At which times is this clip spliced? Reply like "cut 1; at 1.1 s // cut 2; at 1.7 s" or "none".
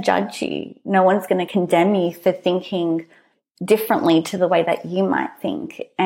cut 1; at 1.5 s

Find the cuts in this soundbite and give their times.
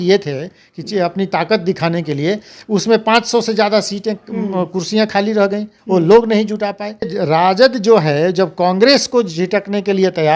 cut 1; at 7.2 s

